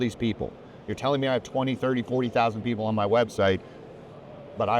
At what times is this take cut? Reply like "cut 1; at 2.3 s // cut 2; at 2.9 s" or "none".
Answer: none